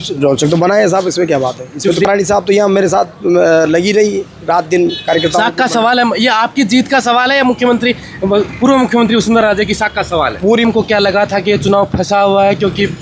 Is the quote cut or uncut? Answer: cut